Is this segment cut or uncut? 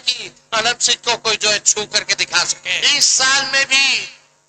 cut